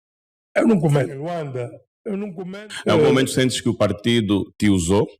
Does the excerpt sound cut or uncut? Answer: cut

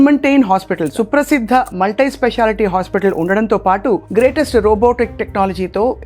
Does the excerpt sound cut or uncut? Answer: cut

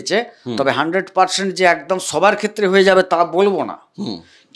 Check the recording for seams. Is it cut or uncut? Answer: uncut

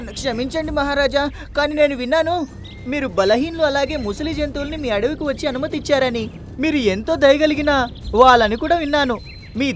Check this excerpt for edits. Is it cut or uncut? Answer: uncut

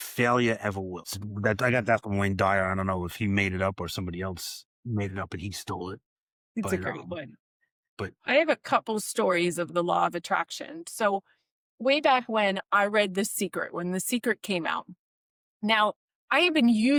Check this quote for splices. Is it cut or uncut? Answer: uncut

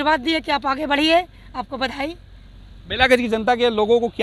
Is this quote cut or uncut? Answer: uncut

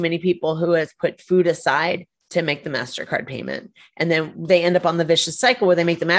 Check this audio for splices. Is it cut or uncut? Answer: uncut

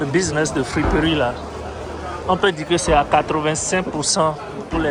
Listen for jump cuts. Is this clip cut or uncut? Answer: uncut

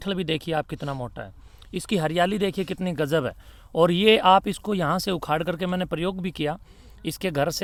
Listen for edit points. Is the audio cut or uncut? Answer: uncut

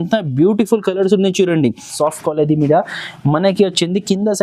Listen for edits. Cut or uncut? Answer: cut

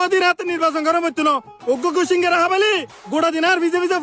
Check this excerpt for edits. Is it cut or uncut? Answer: uncut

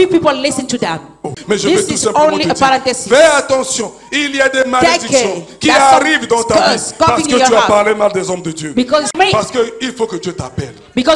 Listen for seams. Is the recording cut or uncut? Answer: cut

